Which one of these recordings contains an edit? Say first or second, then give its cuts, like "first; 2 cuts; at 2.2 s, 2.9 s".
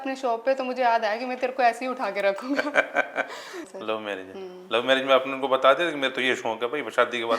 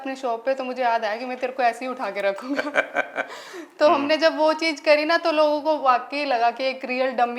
first; 1 cut; at 3.6 s